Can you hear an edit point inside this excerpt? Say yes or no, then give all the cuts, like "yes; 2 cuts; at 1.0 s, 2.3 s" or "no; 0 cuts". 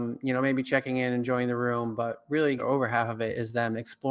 yes; 1 cut; at 2.6 s